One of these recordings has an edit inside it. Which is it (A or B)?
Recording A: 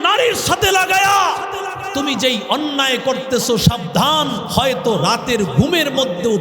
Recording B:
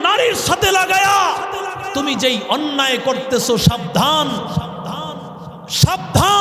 A